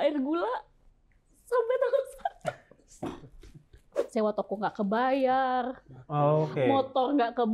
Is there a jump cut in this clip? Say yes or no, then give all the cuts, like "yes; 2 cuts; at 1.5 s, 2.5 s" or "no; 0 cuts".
yes; 1 cut; at 4.0 s